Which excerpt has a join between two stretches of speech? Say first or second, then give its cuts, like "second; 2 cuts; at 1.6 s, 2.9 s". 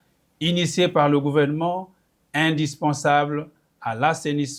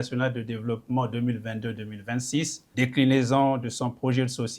second; 1 cut; at 2.6 s